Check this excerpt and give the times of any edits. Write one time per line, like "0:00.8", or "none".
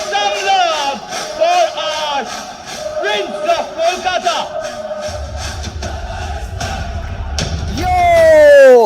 0:07.7